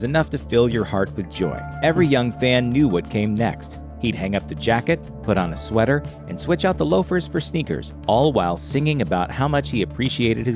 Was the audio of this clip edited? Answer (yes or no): no